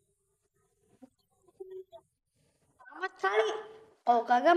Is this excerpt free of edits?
yes; 0 cuts

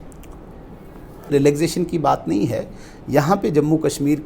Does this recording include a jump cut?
yes; 1 cut; at 1.3 s

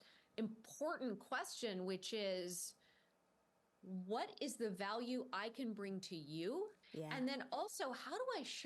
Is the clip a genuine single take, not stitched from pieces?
no; 1 cut; at 6.8 s

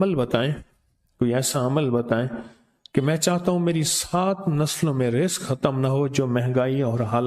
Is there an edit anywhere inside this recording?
no; 0 cuts

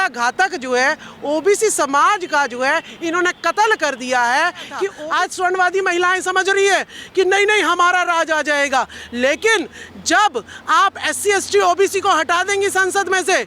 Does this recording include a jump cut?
yes; 1 cut; at 4.9 s

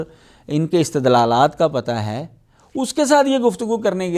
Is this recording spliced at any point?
no; 0 cuts

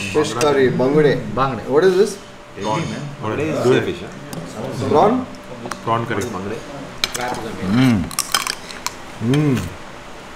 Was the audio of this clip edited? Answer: no; 0 cuts

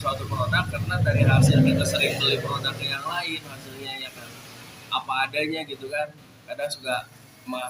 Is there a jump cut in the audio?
no; 0 cuts

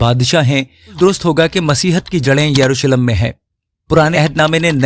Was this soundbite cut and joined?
yes; 2 cuts; at 1.0 s, 4.1 s

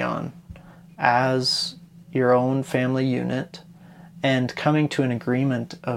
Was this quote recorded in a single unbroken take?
yes; 0 cuts

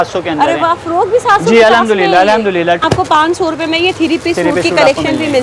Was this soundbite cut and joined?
yes; 1 cut; at 2.8 s

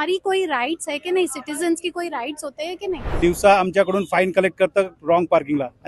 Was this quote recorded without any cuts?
no; 1 cut; at 3.1 s

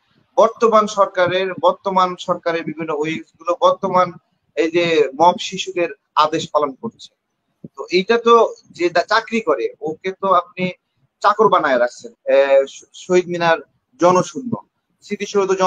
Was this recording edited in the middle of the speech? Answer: yes; 1 cut; at 12.1 s

